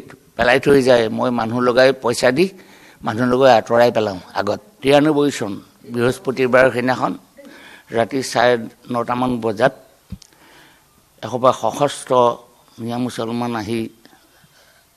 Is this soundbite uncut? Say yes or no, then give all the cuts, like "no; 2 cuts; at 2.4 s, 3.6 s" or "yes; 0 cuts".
no; 1 cut; at 4.7 s